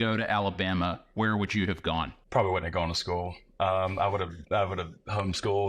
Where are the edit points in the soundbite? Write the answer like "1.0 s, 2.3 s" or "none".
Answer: 2.2 s